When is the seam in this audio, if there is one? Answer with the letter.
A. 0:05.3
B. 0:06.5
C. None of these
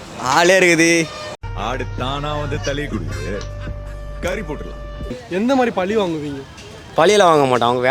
A